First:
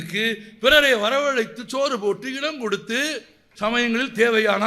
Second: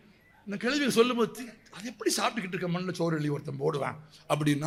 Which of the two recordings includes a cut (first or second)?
first